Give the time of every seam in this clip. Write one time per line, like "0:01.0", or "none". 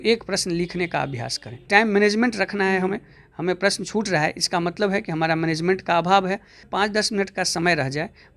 0:01.6
0:06.7